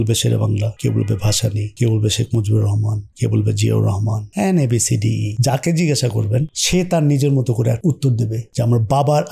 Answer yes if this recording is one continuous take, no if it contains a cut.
no